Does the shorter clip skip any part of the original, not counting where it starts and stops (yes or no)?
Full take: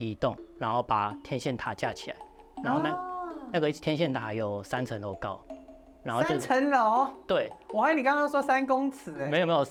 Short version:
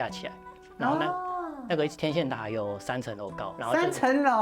yes